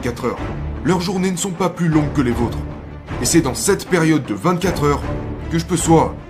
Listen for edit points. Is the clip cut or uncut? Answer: uncut